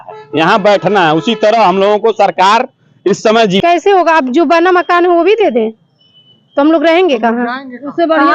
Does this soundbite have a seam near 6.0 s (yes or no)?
no